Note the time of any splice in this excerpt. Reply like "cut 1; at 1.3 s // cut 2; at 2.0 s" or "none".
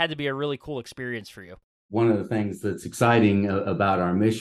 cut 1; at 1.9 s